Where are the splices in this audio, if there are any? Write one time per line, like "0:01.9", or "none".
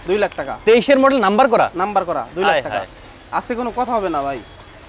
none